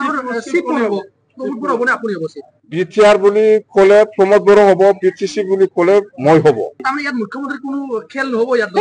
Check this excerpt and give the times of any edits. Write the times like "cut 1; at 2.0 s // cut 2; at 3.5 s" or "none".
cut 1; at 2.5 s // cut 2; at 6.8 s